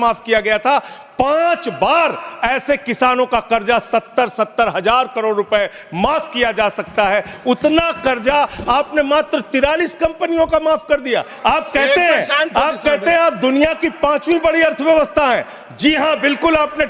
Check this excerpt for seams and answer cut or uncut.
uncut